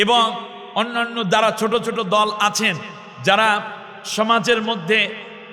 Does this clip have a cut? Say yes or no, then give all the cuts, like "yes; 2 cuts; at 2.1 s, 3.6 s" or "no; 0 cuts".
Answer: no; 0 cuts